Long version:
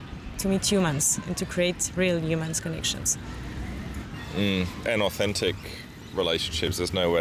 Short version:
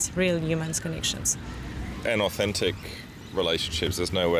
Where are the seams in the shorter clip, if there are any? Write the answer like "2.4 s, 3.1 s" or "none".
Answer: 1.9 s

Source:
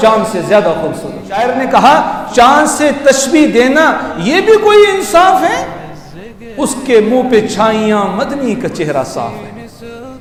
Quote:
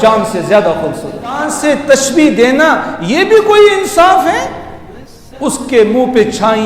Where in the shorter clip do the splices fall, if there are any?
1.4 s

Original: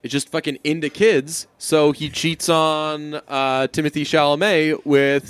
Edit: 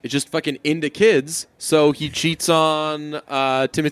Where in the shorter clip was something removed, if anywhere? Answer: none

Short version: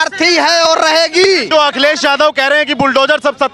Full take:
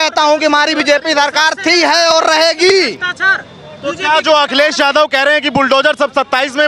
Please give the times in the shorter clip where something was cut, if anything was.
1.5 s

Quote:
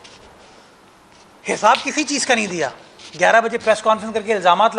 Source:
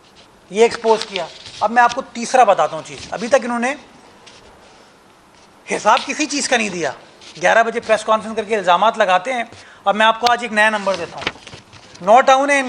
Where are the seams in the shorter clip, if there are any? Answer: none

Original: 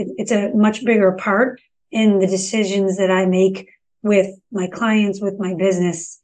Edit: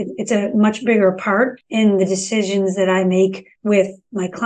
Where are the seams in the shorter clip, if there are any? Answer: 1.6 s, 3.5 s

